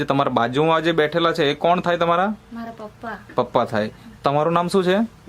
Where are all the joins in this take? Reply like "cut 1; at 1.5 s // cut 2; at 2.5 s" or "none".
none